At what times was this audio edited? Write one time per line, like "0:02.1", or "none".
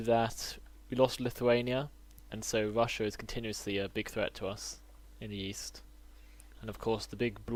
none